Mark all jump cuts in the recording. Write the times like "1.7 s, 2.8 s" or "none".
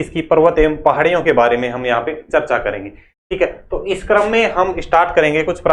none